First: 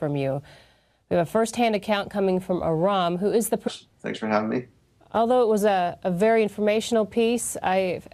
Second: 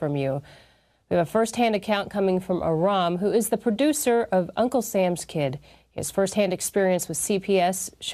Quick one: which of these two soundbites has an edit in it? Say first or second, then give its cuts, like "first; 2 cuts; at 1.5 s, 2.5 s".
second; 1 cut; at 3.6 s